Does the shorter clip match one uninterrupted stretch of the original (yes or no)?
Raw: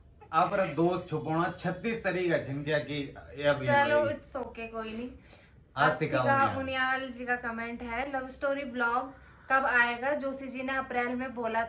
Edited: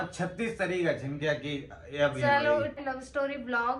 no